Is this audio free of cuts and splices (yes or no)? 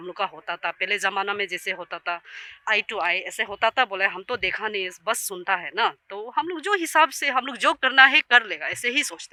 yes